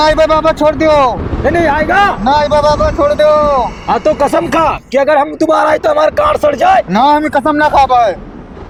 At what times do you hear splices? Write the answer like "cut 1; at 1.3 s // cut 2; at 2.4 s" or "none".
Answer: none